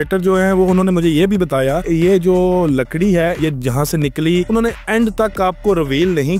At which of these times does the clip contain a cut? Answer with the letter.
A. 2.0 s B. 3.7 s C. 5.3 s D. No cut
D